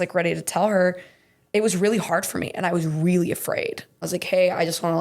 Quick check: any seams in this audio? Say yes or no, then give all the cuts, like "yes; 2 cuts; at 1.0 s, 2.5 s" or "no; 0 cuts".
yes; 1 cut; at 4.0 s